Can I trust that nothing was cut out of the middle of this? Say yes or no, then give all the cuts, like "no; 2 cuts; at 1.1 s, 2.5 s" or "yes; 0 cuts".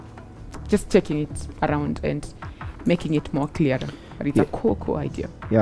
yes; 0 cuts